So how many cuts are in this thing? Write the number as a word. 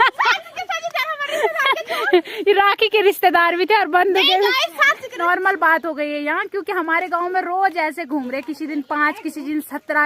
one